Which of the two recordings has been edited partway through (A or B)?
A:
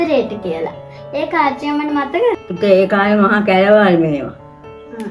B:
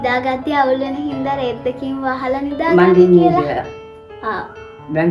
A